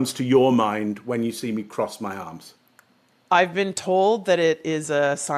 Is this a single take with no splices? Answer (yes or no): yes